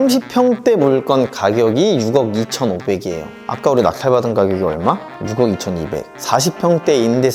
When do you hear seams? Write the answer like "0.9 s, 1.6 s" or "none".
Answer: none